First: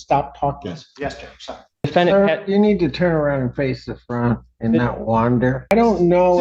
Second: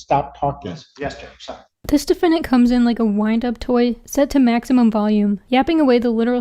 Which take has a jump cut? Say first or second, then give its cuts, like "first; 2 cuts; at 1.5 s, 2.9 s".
first; 2 cuts; at 1.9 s, 5.7 s